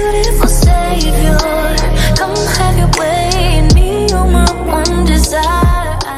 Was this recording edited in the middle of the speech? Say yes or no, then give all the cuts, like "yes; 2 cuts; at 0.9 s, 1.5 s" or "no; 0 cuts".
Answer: no; 0 cuts